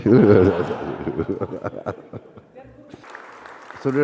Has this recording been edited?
yes; 1 cut; at 3.0 s

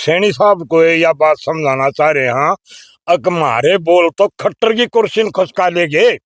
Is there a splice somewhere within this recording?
no; 0 cuts

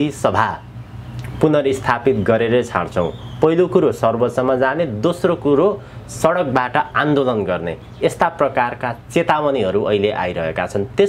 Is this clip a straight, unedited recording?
yes; 0 cuts

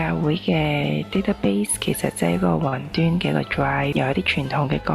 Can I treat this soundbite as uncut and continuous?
no; 1 cut; at 3.9 s

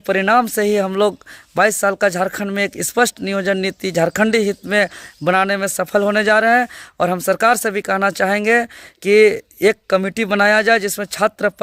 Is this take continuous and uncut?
yes; 0 cuts

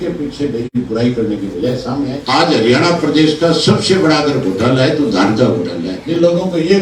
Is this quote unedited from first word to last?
no; 2 cuts; at 2.2 s, 5.9 s

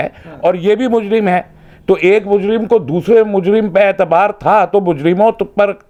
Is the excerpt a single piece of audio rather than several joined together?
yes; 0 cuts

